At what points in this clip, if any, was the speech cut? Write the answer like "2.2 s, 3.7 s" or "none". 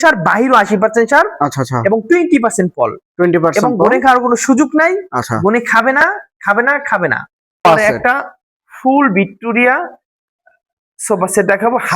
7.6 s